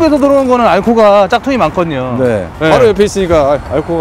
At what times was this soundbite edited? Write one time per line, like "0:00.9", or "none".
0:02.5